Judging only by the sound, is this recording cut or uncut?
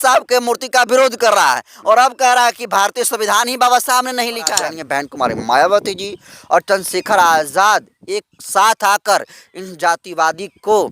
cut